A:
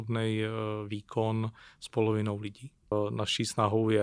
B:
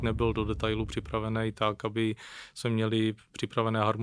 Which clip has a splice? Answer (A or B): A